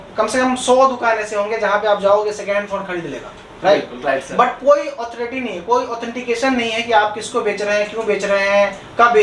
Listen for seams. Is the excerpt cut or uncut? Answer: uncut